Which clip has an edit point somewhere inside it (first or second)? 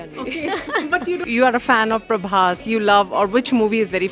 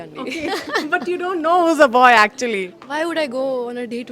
first